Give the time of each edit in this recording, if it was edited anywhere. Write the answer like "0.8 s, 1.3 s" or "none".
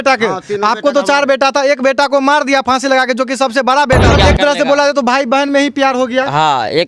4.1 s